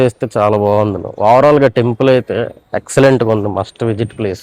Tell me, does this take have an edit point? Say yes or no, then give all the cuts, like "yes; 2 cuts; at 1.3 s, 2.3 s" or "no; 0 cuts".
no; 0 cuts